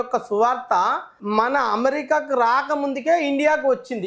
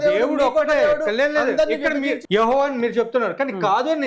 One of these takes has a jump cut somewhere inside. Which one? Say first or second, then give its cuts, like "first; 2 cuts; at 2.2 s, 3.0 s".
second; 1 cut; at 2.2 s